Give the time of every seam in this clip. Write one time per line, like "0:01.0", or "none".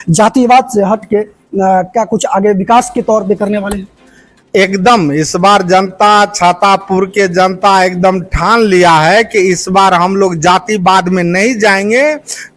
none